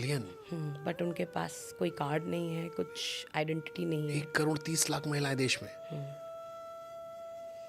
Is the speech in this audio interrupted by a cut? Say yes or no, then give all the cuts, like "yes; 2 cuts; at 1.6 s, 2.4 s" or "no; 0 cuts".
no; 0 cuts